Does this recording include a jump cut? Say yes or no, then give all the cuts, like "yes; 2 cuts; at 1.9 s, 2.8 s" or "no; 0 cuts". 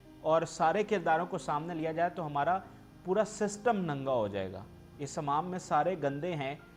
no; 0 cuts